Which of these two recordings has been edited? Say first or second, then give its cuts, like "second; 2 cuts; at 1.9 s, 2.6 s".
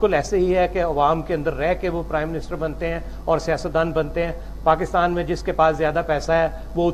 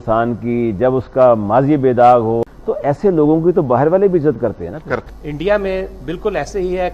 second; 2 cuts; at 2.4 s, 5.1 s